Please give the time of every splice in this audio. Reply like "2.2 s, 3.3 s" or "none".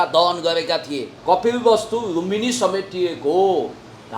1.1 s